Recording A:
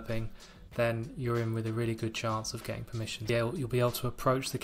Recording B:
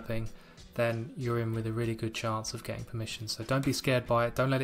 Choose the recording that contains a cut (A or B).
A